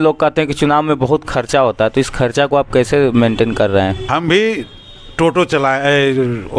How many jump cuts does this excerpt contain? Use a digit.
1